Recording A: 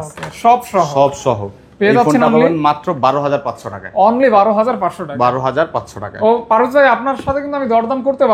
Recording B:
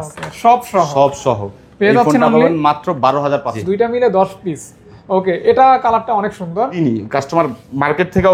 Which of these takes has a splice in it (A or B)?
B